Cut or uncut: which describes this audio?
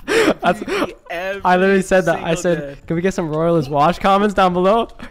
uncut